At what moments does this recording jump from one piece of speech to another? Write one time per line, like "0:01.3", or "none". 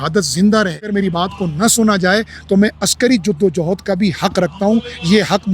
0:00.9